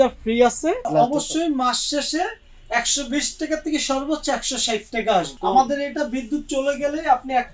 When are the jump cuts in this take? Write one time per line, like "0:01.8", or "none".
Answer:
0:00.8
0:05.3